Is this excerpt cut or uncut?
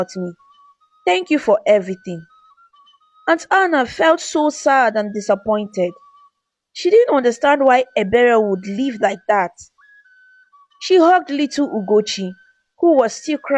uncut